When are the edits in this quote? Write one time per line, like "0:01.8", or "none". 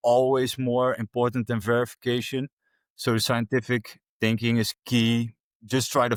none